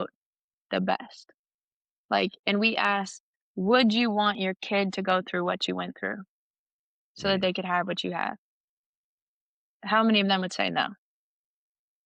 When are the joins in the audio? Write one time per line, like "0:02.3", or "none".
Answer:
none